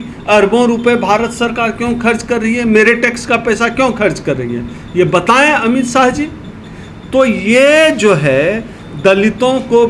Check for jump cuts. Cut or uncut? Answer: uncut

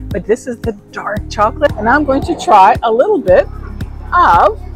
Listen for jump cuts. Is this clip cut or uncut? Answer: cut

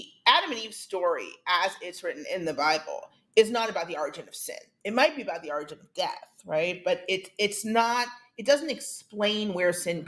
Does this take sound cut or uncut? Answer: uncut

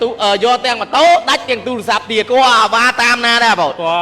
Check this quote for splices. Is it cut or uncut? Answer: cut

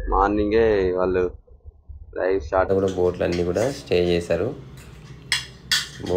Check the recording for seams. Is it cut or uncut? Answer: cut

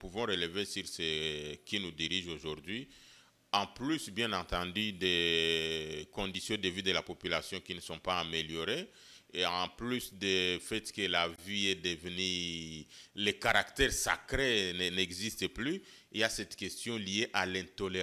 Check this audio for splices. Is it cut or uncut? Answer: uncut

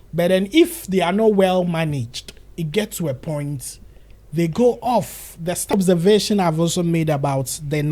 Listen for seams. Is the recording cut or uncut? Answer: cut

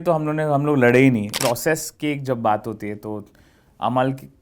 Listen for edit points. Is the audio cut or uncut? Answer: cut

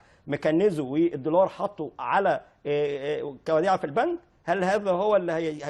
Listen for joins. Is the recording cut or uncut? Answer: uncut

